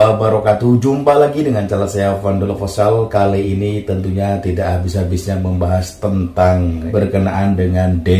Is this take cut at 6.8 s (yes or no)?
yes